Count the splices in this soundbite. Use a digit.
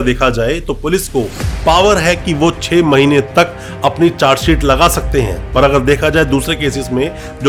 0